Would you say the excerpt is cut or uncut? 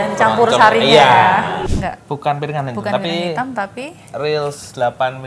cut